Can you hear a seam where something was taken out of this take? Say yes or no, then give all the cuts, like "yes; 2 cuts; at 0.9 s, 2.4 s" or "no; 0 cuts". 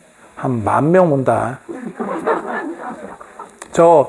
no; 0 cuts